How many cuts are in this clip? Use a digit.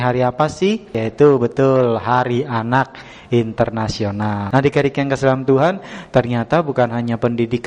2